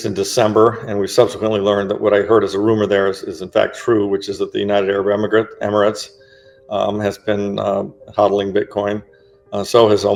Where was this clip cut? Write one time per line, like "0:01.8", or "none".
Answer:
none